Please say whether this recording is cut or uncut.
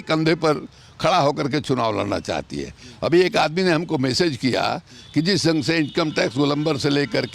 uncut